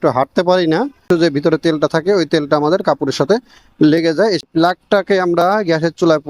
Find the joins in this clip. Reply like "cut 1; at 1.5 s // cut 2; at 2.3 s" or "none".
cut 1; at 1.0 s // cut 2; at 4.4 s